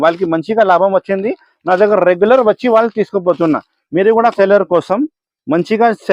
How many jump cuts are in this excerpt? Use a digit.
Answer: 1